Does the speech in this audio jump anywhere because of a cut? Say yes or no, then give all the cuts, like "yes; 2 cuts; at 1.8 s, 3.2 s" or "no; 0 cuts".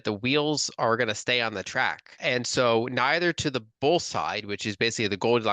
yes; 1 cut; at 2.2 s